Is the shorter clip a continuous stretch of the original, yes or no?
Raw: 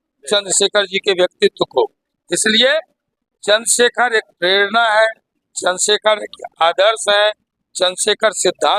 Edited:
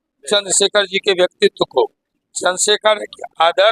no